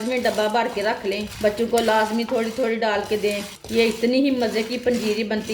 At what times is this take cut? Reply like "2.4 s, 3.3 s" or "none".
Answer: 3.5 s